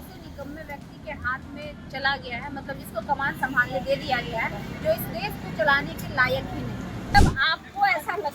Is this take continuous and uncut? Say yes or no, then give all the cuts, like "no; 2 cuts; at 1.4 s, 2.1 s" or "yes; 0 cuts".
no; 1 cut; at 7.1 s